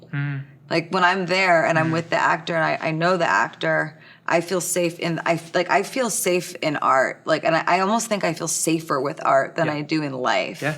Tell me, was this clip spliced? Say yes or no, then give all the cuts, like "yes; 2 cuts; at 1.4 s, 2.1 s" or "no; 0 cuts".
no; 0 cuts